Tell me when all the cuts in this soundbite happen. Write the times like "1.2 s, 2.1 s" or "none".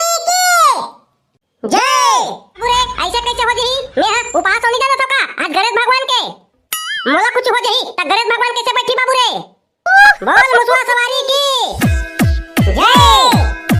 2.6 s